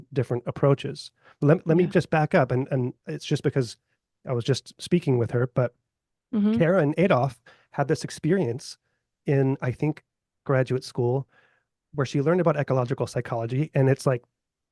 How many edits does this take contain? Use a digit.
0